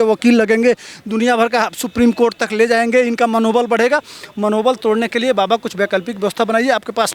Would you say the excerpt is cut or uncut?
uncut